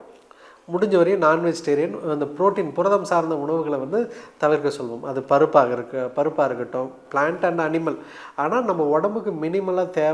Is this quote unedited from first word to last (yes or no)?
yes